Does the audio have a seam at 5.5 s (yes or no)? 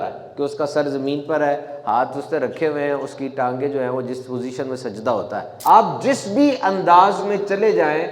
yes